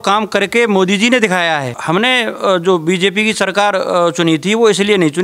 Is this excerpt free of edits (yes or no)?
no